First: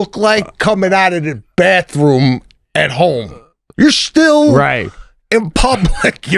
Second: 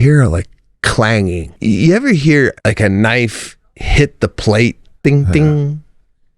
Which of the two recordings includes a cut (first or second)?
second